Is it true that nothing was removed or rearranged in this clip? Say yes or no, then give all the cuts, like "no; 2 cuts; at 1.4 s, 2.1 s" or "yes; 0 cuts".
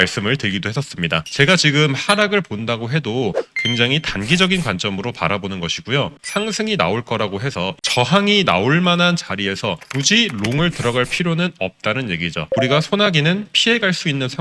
no; 2 cuts; at 6.1 s, 7.8 s